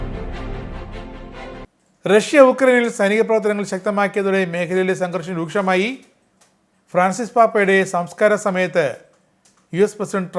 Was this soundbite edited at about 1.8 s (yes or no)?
yes